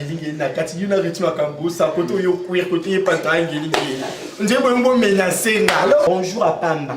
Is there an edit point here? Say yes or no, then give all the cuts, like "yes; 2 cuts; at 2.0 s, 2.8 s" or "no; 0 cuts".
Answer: yes; 1 cut; at 6.1 s